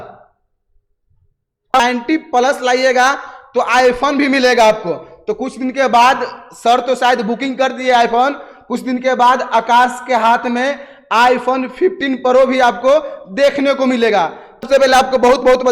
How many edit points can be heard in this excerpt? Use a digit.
2